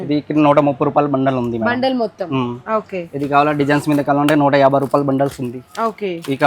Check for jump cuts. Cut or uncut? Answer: uncut